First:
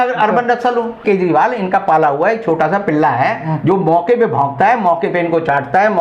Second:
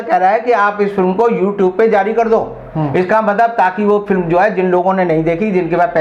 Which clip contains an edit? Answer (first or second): first